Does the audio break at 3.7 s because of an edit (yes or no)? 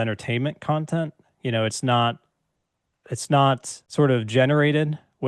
yes